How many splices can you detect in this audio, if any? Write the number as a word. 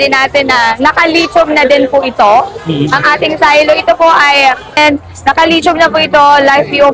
one